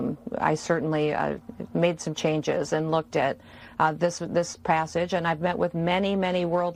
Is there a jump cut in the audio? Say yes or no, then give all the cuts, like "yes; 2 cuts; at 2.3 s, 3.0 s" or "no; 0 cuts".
no; 0 cuts